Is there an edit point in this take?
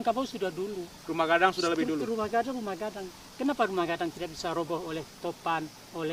no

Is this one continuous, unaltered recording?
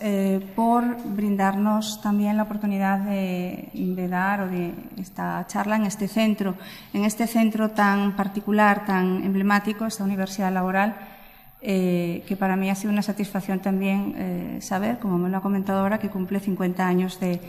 yes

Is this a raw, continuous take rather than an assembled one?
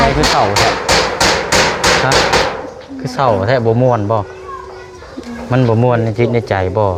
yes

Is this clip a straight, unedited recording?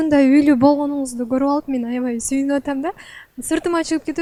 yes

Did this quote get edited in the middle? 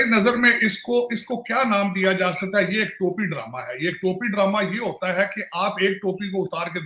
no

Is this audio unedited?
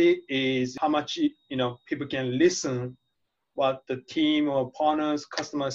yes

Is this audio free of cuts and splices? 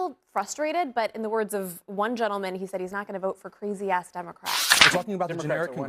no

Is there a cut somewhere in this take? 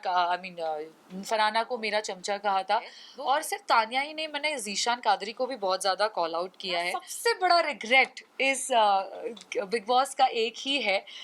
yes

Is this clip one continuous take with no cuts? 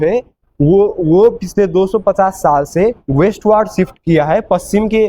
yes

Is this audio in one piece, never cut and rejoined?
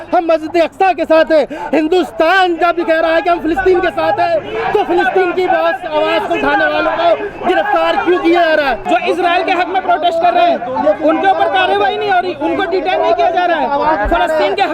no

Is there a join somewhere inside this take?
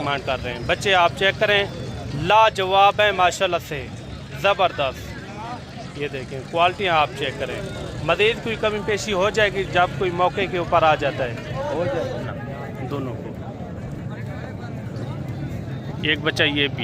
yes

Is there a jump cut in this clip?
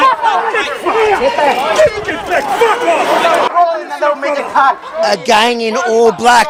no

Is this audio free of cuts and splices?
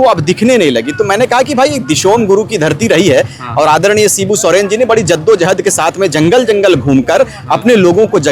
yes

